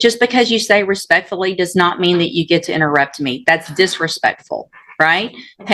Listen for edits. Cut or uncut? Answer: uncut